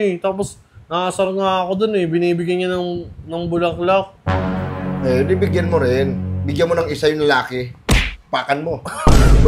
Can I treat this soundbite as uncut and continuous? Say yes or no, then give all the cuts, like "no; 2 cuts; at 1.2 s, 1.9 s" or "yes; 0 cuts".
yes; 0 cuts